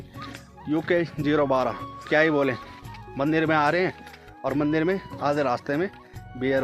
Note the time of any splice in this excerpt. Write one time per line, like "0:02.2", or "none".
0:01.9